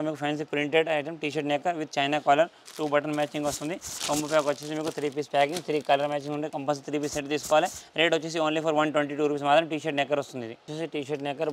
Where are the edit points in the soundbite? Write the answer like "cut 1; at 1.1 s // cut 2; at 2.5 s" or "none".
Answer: none